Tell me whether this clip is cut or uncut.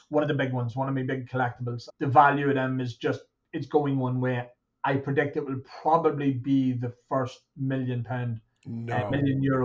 cut